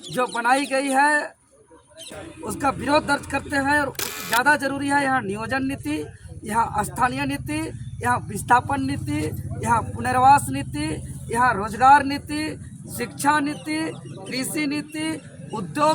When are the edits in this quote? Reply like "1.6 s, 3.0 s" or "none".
2.1 s, 4.1 s